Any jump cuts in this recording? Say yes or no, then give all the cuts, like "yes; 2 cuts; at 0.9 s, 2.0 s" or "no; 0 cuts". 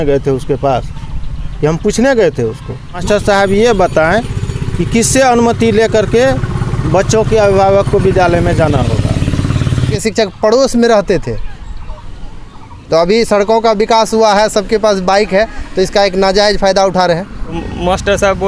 yes; 3 cuts; at 3.0 s, 10.0 s, 17.6 s